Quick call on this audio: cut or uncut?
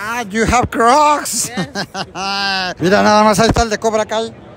cut